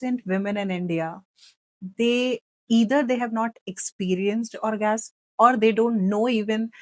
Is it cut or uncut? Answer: uncut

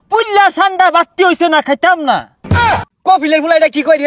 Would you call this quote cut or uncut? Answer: cut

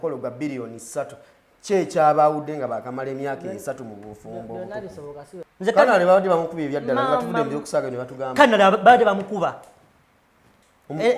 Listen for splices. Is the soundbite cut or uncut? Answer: cut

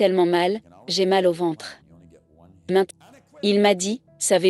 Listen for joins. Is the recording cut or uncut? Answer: cut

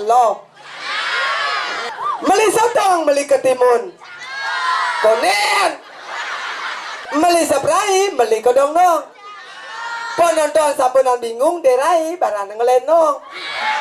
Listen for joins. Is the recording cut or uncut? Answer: cut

